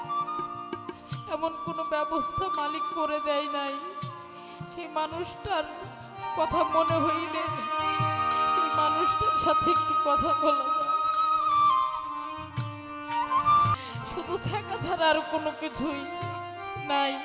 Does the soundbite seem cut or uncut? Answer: cut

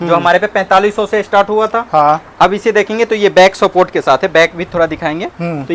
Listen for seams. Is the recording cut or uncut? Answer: uncut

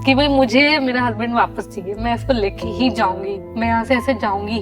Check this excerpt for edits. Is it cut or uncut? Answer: uncut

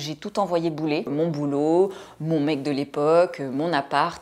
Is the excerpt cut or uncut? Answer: cut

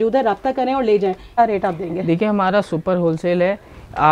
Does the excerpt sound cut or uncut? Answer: cut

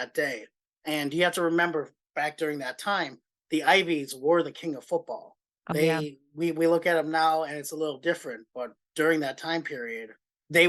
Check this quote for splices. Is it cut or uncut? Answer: cut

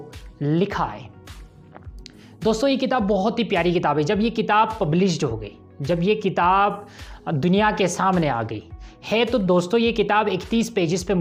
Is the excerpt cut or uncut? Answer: uncut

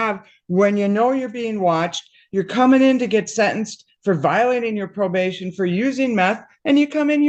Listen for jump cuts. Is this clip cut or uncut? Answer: uncut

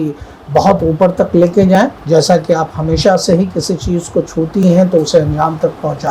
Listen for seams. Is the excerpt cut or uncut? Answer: uncut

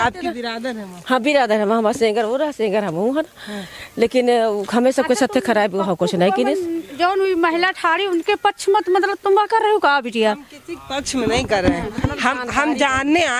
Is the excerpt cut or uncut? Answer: uncut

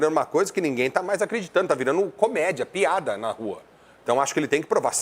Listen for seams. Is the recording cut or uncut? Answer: uncut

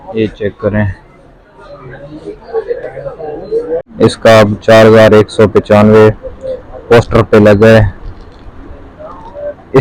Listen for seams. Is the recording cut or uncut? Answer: cut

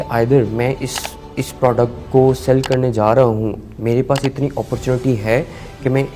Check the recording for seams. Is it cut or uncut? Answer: uncut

